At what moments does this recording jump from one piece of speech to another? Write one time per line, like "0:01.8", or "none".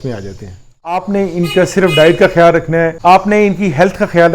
0:00.9
0:02.9

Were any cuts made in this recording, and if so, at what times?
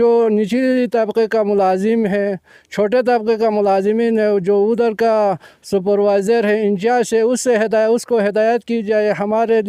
none

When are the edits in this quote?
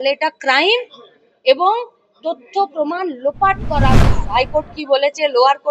0:04.2

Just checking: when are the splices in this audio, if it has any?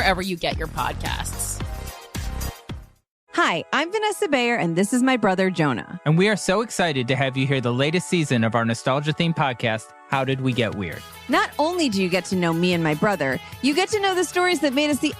0:00.9

